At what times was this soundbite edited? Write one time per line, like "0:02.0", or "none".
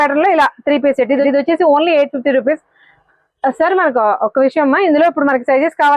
none